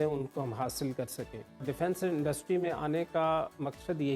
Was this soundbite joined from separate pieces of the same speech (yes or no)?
yes